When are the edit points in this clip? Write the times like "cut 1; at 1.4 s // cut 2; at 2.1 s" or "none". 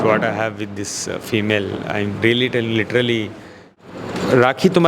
cut 1; at 3.7 s